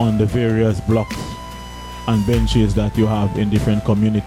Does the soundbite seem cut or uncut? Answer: uncut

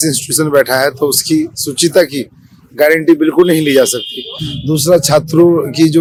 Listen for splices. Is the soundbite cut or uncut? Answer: uncut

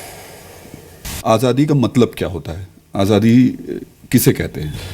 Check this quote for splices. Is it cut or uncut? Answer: cut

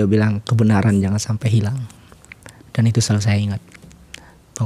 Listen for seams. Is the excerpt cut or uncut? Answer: uncut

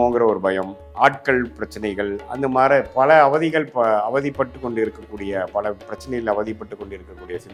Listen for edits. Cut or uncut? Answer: uncut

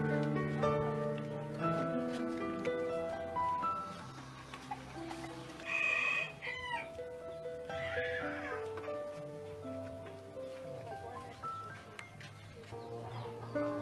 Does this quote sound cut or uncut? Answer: uncut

